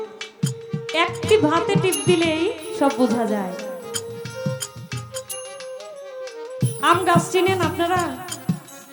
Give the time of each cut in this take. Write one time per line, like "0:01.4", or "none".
none